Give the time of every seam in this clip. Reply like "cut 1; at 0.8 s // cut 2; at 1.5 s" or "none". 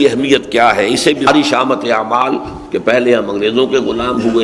cut 1; at 1.3 s